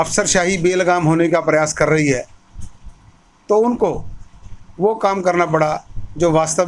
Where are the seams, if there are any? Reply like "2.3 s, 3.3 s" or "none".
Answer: none